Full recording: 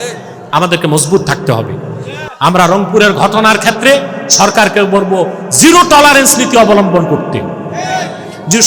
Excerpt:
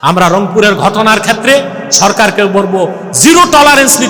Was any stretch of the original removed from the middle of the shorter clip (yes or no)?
no